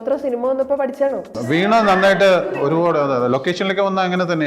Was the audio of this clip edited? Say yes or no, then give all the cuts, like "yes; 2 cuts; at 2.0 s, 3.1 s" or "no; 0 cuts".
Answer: yes; 2 cuts; at 1.4 s, 2.6 s